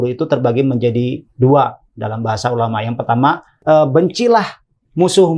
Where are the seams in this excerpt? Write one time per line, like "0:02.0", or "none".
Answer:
0:03.5